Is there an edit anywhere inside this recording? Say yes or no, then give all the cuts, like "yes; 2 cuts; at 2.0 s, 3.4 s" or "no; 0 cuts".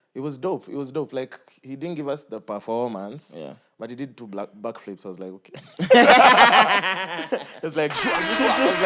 no; 0 cuts